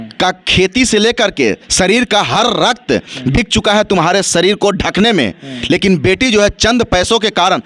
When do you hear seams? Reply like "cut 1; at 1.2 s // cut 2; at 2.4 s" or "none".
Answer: none